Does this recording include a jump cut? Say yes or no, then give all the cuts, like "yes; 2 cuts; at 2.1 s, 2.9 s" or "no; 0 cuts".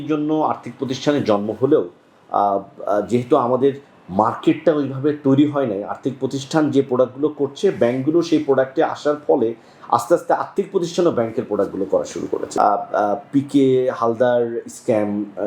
yes; 1 cut; at 12.4 s